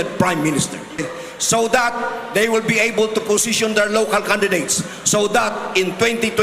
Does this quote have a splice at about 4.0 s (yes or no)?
no